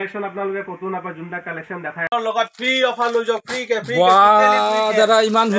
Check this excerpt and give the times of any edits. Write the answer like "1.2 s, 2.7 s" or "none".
2.1 s